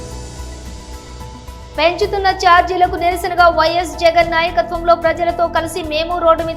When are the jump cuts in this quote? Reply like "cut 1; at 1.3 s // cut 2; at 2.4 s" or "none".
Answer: cut 1; at 1.4 s